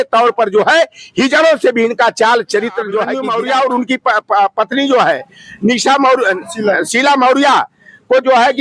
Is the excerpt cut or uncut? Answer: cut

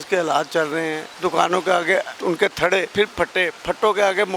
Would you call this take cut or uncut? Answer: cut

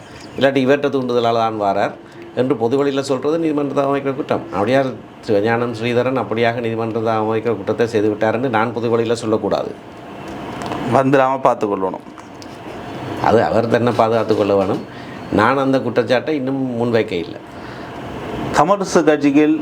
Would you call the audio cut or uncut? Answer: uncut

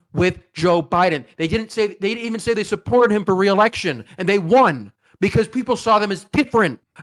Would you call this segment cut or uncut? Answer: uncut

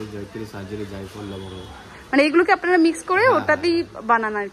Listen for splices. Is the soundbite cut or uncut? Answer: uncut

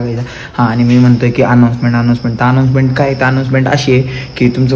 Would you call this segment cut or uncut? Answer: uncut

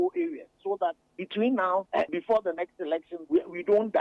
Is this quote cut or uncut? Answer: cut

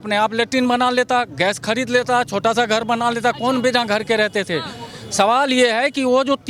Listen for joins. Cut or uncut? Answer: uncut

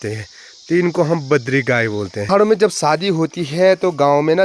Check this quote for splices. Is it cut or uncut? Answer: cut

